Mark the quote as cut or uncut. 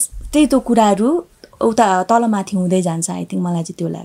uncut